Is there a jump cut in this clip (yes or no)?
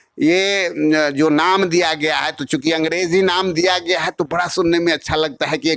no